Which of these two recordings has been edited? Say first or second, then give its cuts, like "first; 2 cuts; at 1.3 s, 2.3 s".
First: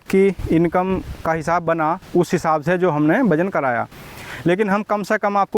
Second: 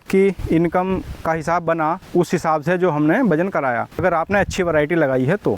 second; 1 cut; at 4.0 s